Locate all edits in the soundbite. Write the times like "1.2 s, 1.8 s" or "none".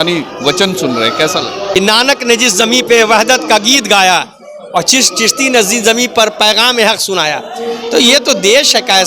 1.6 s